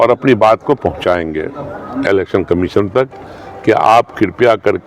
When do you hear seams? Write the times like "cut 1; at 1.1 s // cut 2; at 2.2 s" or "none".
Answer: none